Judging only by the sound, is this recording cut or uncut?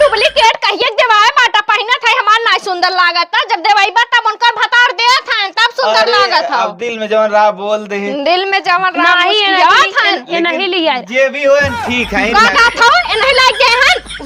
uncut